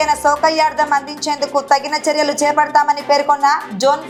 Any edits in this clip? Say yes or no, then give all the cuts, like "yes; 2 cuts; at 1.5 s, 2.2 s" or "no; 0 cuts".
no; 0 cuts